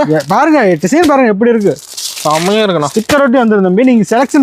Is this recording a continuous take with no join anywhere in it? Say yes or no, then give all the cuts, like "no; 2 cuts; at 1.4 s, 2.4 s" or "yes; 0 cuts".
yes; 0 cuts